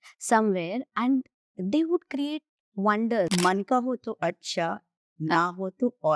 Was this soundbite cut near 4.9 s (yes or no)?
no